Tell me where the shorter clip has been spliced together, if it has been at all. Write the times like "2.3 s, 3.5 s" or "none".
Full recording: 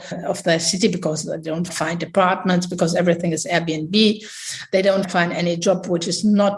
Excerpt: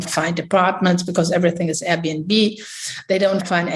none